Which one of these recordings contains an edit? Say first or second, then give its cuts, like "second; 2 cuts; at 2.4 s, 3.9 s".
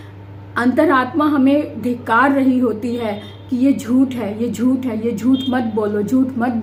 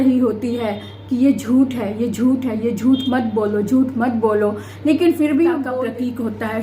second; 1 cut; at 5.7 s